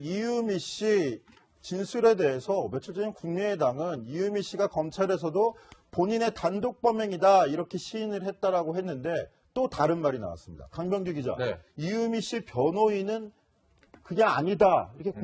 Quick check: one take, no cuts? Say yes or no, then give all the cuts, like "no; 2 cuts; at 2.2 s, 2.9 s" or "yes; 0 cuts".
no; 1 cut; at 1.9 s